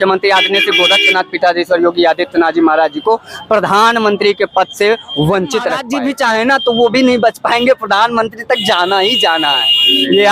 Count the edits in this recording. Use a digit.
1